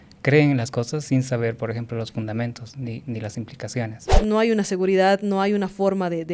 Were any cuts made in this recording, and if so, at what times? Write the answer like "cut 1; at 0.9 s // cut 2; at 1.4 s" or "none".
cut 1; at 4.2 s